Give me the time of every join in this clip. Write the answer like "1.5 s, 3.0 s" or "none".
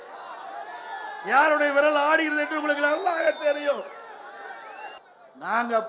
5.0 s